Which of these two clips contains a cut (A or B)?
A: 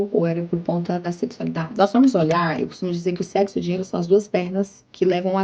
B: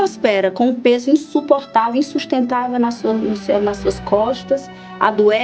A